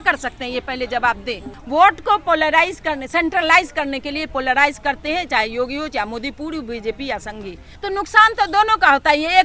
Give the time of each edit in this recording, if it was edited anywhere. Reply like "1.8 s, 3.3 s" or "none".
1.5 s, 7.7 s